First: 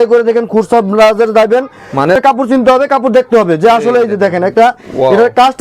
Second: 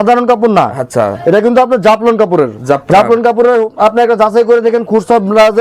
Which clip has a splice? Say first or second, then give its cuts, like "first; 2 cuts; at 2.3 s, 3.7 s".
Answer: first; 1 cut; at 2.2 s